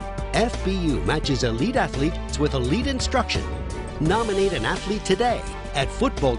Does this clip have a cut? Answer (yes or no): no